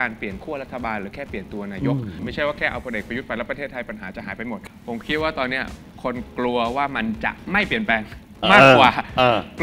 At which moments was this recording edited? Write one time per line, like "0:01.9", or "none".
0:02.2
0:04.7